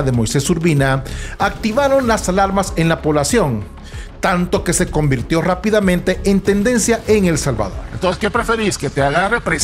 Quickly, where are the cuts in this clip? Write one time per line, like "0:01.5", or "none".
0:07.8

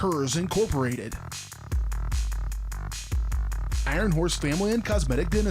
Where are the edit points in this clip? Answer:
none

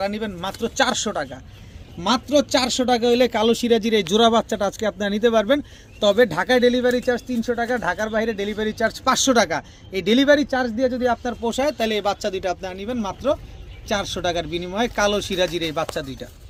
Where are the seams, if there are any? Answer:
none

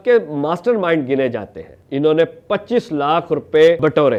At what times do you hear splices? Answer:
none

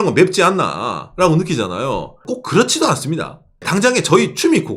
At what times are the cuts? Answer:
0:02.2
0:03.7

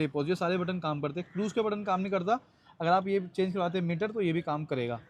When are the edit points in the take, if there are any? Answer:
none

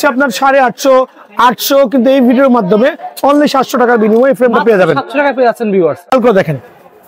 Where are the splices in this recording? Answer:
0:06.1

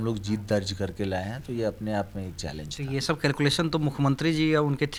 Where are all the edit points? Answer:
none

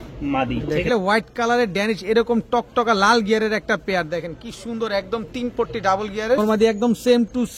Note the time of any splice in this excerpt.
0:00.9
0:06.4

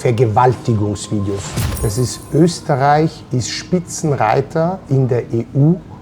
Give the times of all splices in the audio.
0:01.6

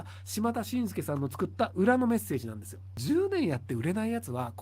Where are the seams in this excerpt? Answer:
0:02.9

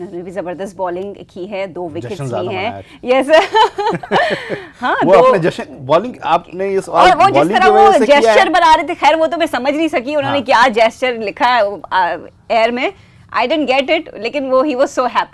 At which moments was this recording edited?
none

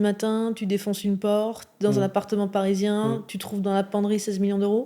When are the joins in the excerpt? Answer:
none

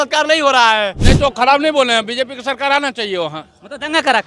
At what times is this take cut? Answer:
0:01.0

